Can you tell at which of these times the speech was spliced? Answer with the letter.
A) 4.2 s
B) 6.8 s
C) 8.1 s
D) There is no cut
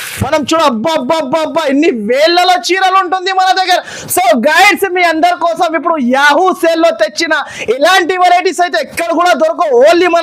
D